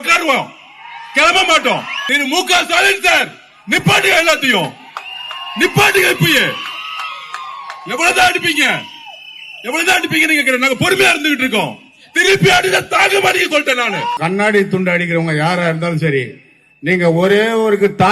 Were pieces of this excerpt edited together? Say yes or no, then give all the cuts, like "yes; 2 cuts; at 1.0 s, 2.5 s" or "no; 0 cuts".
yes; 2 cuts; at 2.0 s, 14.2 s